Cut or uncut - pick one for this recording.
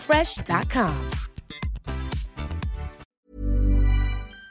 cut